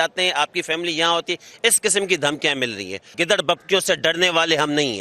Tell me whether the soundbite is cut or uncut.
cut